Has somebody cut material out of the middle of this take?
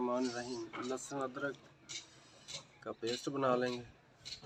no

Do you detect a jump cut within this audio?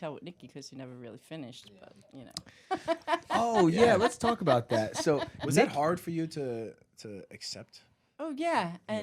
no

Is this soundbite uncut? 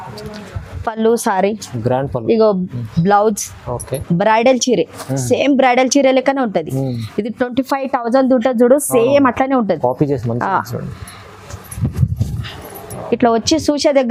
yes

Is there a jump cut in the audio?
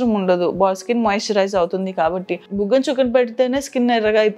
yes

